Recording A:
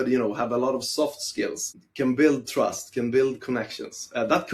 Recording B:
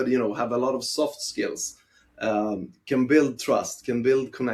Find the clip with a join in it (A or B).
A